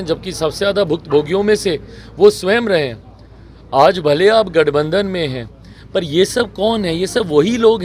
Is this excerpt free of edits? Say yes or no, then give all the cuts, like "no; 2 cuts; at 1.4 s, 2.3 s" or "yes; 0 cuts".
yes; 0 cuts